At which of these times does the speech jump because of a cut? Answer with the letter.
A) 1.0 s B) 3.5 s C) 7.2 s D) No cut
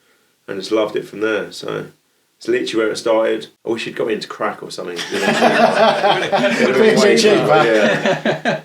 B